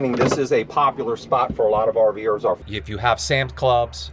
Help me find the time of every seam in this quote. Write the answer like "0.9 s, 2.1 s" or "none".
2.6 s